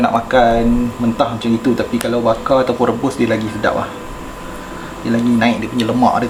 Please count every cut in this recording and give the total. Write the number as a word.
zero